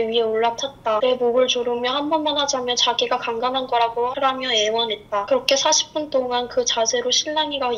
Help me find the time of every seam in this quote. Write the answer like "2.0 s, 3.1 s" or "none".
5.3 s